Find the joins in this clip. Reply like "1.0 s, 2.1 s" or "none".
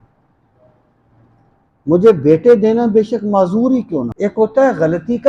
4.1 s